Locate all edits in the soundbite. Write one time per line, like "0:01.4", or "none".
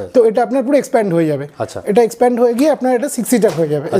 none